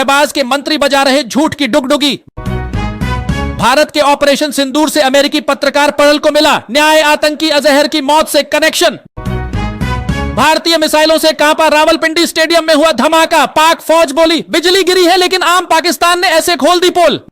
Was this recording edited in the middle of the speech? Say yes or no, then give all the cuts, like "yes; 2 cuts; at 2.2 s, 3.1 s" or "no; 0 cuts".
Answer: yes; 1 cut; at 16.3 s